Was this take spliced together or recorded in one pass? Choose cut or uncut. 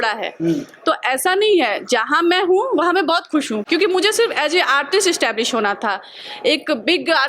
uncut